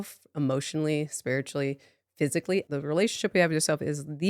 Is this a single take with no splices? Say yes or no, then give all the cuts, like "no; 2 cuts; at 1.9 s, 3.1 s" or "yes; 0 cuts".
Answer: no; 1 cut; at 2.7 s